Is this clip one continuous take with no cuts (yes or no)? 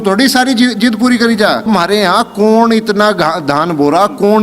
no